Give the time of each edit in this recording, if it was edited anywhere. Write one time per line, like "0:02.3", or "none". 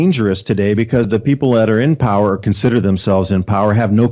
0:01.1